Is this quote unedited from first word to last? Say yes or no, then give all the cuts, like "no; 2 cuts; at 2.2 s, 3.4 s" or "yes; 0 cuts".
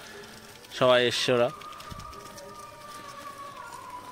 yes; 0 cuts